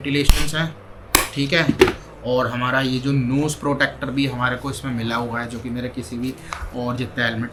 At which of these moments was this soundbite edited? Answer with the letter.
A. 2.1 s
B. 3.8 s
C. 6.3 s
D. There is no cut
D